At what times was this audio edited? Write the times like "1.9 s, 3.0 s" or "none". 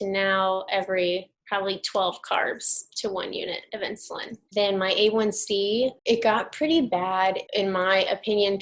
1.4 s, 4.4 s, 6.0 s, 7.4 s